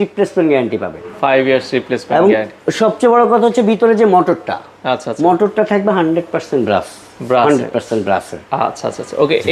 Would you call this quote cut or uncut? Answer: uncut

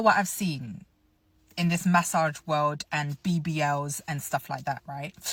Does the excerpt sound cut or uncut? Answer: uncut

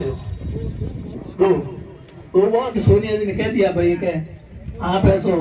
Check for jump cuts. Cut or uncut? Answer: cut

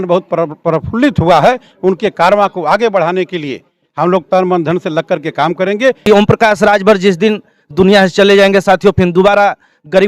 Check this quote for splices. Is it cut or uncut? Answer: cut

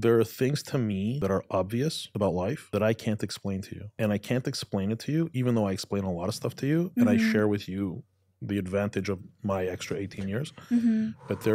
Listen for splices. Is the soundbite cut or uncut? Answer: cut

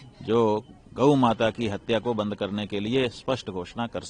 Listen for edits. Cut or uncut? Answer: uncut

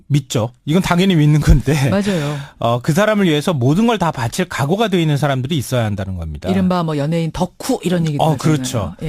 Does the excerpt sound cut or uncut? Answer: uncut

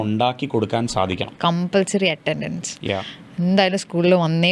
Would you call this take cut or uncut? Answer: cut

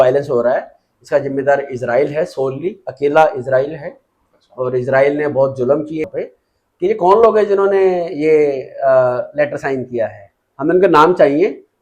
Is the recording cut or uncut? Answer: cut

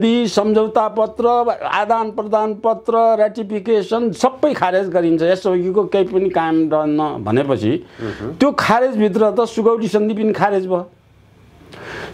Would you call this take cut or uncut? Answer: uncut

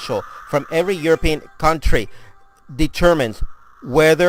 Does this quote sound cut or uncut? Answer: uncut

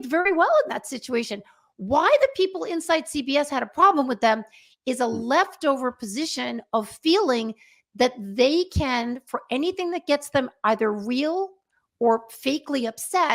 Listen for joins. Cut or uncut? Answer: uncut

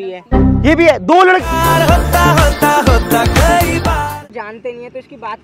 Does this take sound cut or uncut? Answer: cut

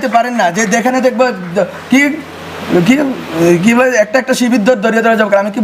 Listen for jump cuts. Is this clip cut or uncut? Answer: uncut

